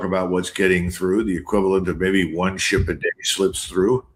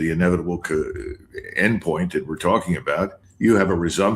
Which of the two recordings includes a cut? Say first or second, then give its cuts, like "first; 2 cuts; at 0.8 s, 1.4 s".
second; 1 cut; at 3.2 s